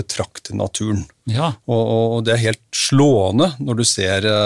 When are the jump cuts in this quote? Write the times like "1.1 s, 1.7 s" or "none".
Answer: none